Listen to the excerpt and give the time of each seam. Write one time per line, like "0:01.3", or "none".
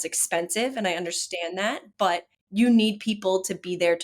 0:02.4

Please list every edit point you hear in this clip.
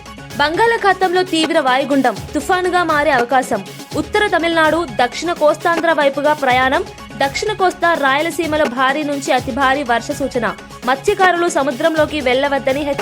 none

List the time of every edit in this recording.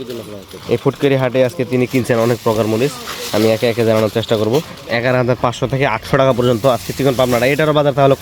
0:04.7

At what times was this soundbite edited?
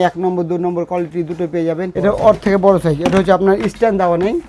0:01.9

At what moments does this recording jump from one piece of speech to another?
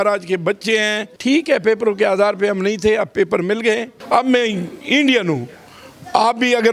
0:01.1
0:03.9

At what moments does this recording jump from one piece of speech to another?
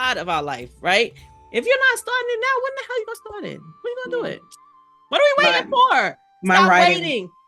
0:01.3

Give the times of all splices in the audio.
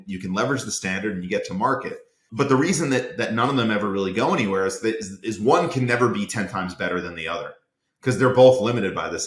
none

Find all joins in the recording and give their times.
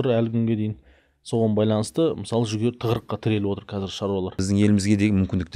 0:04.4

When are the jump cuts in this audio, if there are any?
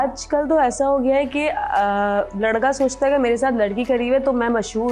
none

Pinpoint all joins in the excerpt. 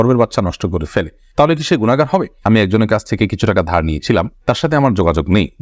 0:02.5

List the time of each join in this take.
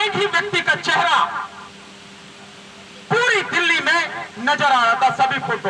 none

